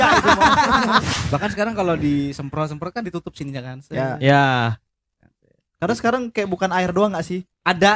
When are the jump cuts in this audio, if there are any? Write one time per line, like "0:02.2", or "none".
0:01.1

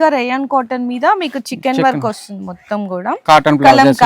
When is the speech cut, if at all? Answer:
0:03.1

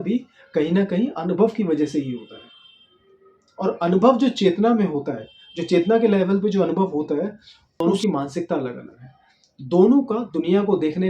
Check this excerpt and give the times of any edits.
0:07.8

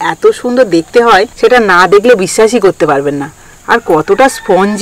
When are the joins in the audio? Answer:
0:01.3

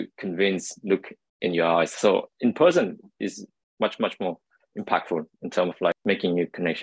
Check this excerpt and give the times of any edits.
0:05.9

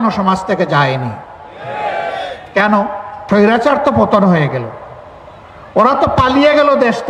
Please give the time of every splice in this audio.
0:03.1

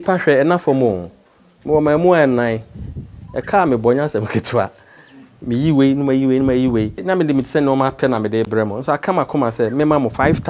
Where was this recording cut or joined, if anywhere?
0:07.0

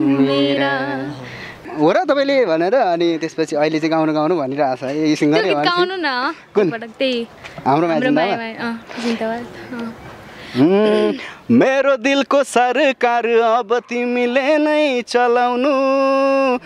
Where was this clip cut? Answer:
0:01.6

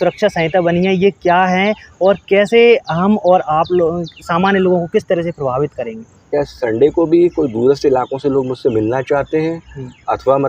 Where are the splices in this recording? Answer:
0:06.3

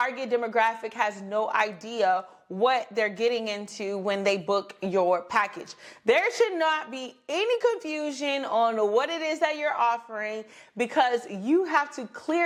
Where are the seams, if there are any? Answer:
none

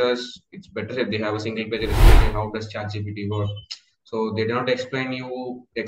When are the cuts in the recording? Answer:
0:02.2

